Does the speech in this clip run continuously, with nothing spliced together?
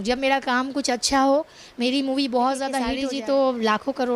no; 1 cut; at 3.0 s

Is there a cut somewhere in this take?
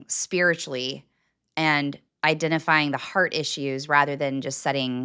no; 0 cuts

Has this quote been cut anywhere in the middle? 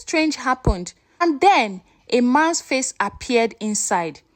yes; 1 cut; at 1.2 s

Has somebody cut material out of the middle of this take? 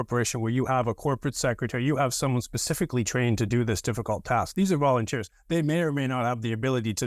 no; 0 cuts

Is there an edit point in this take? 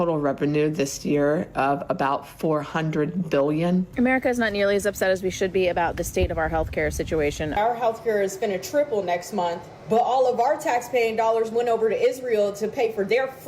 yes; 3 cuts; at 3.9 s, 7.6 s, 9.7 s

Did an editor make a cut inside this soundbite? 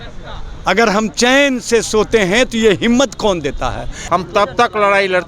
yes; 1 cut; at 3.9 s

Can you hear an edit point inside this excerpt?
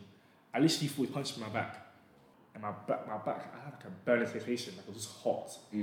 yes; 1 cut; at 2.2 s

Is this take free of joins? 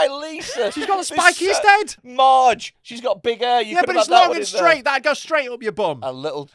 no; 1 cut; at 2.0 s

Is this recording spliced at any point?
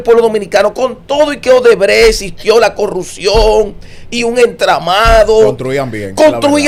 no; 0 cuts

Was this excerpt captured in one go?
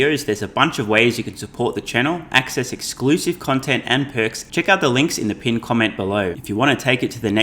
no; 2 cuts; at 4.4 s, 6.4 s

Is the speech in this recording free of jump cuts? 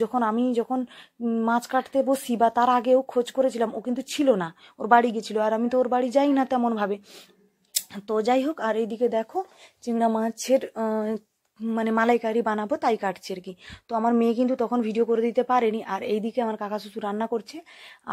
yes; 0 cuts

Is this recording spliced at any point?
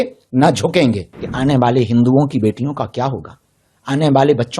yes; 1 cut; at 1.1 s

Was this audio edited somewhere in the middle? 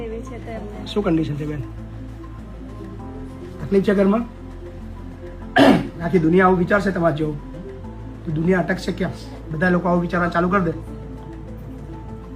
no; 0 cuts

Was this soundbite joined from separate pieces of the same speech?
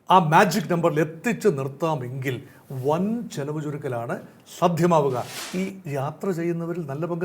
yes; 1 cut; at 5.4 s

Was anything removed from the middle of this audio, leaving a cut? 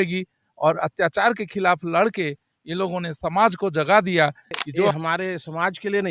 yes; 1 cut; at 4.9 s

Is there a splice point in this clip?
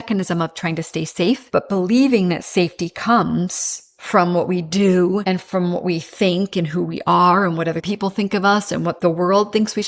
yes; 3 cuts; at 1.4 s, 5.2 s, 9.0 s

